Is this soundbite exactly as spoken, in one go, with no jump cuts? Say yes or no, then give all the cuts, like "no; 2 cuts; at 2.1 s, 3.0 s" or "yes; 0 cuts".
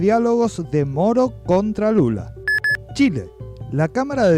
no; 1 cut; at 2.3 s